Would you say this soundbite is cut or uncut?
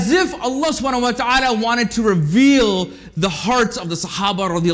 uncut